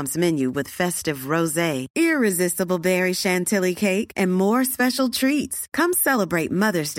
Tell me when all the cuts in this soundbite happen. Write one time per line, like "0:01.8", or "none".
none